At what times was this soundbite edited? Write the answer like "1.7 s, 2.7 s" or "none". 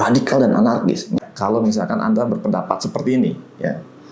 1.2 s